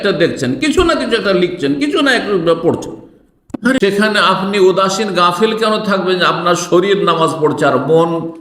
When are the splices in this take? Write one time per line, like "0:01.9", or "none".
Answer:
0:03.8